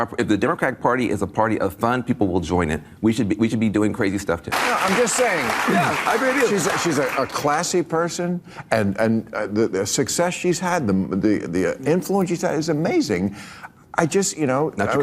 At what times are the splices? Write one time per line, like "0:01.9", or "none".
0:04.5